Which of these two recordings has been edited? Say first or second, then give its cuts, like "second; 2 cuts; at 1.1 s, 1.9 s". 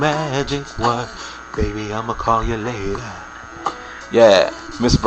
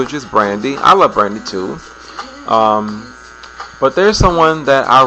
second; 1 cut; at 4.0 s